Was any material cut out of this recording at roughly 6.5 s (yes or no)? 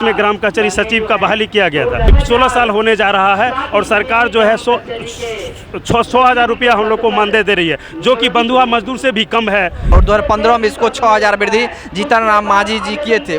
no